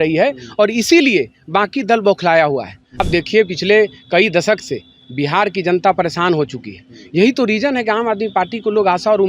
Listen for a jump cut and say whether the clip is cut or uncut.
cut